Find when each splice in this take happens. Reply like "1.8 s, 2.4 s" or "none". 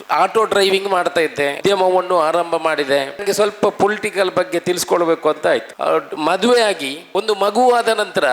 1.6 s, 3.2 s, 5.7 s, 6.9 s